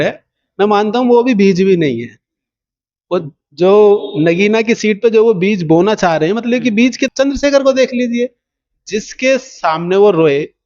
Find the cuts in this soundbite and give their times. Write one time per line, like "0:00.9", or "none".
0:07.1